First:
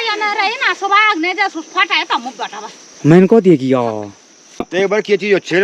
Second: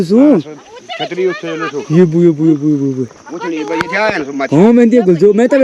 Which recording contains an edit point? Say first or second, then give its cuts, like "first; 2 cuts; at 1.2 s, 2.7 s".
first; 1 cut; at 4.6 s